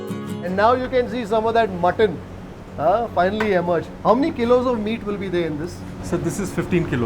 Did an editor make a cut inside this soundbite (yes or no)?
no